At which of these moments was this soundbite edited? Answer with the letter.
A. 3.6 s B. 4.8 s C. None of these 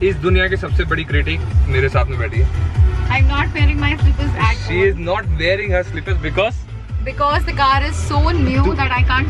C